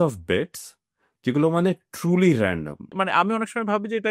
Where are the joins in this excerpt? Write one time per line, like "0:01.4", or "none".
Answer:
0:02.9